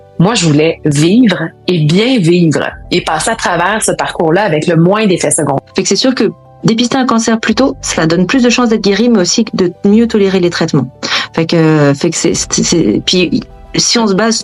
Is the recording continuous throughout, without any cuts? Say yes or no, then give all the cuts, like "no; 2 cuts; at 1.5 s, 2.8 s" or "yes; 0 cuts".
no; 1 cut; at 5.6 s